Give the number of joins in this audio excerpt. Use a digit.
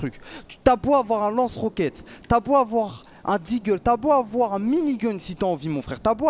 0